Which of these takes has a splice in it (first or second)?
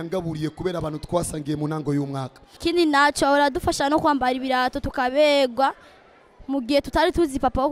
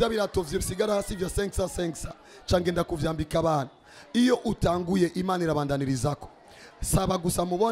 first